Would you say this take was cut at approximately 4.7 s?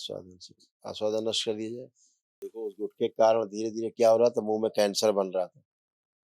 no; 1 cut; at 2.5 s

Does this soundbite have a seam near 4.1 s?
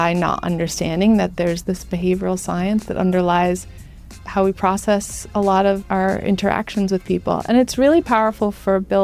yes; 3 cuts; at 1.6 s, 4.1 s, 5.8 s

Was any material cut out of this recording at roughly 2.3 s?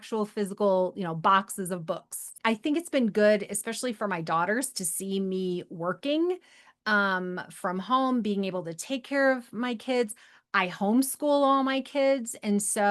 yes; 1 cut; at 2.3 s

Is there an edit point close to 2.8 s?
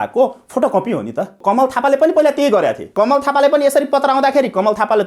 yes; 2 cuts; at 1.4 s, 2.8 s

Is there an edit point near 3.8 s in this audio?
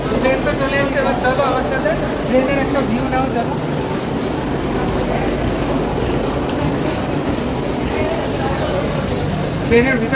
no; 0 cuts

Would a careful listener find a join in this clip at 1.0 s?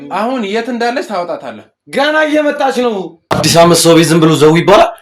no; 1 cut; at 3.3 s

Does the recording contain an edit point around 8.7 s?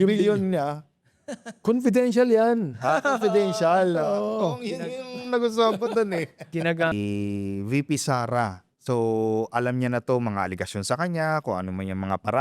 no; 1 cut; at 6.9 s

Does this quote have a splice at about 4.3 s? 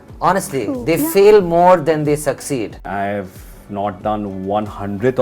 no; 1 cut; at 2.8 s

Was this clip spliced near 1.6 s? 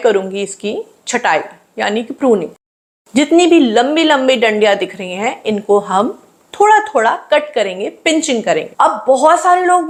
no; 0 cuts

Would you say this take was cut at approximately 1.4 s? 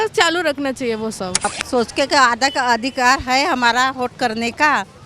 yes; 1 cut; at 1.4 s

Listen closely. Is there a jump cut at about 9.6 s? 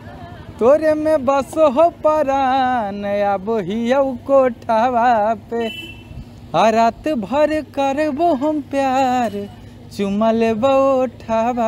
no; 0 cuts

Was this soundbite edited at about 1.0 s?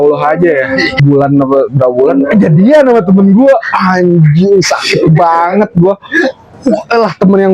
yes; 1 cut; at 1.0 s

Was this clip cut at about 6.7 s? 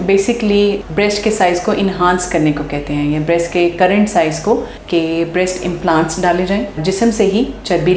yes; 2 cuts; at 4.7 s, 6.7 s

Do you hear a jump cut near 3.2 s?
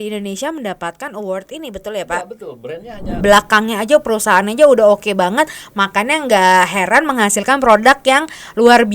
yes; 1 cut; at 3.2 s

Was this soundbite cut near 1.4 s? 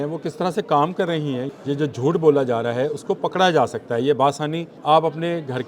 yes; 2 cuts; at 1.4 s, 4.7 s

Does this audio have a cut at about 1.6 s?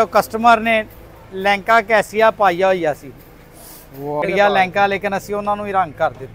no; 1 cut; at 4.2 s

